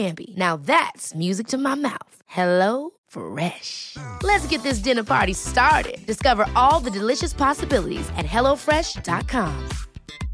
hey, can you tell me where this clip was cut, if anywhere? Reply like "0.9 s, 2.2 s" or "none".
none